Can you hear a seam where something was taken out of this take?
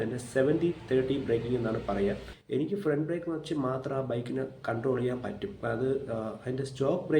yes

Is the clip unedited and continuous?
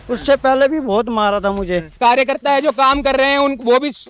no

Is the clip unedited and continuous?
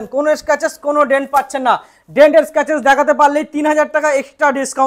yes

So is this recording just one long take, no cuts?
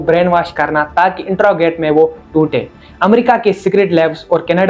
yes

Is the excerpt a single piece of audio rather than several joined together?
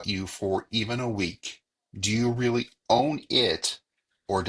yes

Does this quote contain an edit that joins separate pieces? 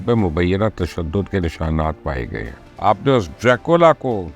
yes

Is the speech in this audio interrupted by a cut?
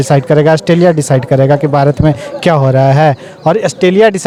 no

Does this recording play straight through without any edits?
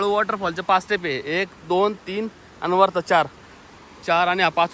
yes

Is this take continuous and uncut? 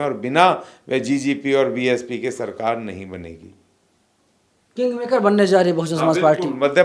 yes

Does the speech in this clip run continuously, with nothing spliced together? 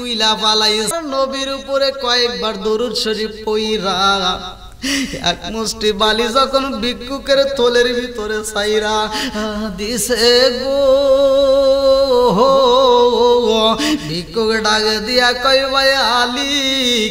no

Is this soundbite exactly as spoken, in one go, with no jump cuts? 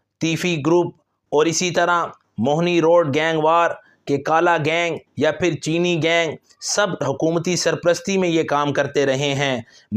yes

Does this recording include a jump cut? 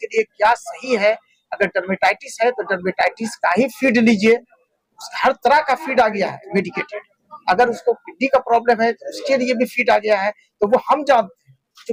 no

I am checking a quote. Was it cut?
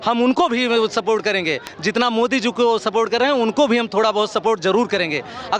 no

